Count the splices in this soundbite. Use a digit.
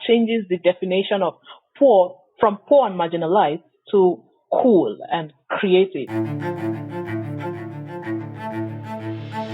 1